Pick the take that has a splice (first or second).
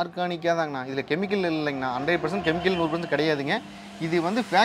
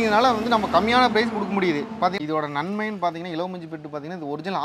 second